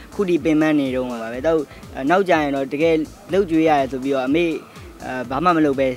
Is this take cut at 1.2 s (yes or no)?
yes